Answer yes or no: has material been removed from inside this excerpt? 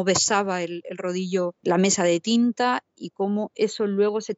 yes